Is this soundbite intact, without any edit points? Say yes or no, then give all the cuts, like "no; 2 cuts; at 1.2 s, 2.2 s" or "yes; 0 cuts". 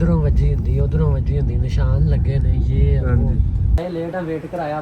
no; 1 cut; at 3.8 s